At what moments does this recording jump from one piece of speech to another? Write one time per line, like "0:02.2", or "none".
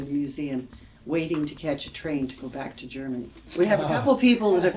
0:03.4